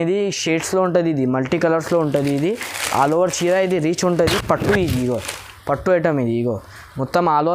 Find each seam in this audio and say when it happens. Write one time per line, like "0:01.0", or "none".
none